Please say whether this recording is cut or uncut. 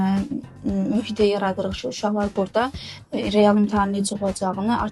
uncut